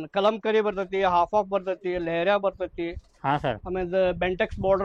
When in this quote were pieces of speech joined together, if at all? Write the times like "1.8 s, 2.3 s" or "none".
none